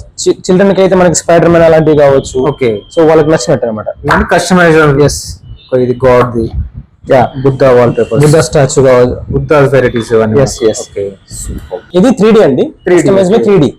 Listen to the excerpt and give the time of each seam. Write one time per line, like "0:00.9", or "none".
0:11.8